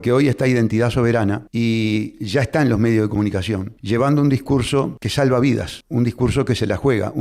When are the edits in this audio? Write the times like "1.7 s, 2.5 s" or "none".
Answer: 1.4 s, 3.7 s, 5.0 s, 5.8 s